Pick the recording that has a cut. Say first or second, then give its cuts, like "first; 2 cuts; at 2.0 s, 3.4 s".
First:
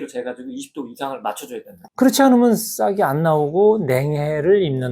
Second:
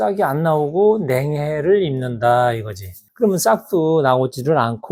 first; 1 cut; at 1.7 s